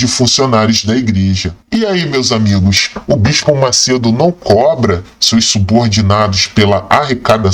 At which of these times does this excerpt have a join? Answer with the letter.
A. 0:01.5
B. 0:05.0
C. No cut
A